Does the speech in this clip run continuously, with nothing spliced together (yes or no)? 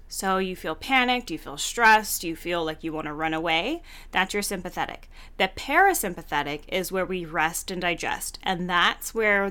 yes